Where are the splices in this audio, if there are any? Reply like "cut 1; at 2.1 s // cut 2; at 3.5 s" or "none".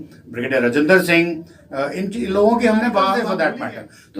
cut 1; at 3.2 s